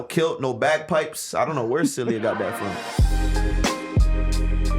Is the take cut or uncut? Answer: cut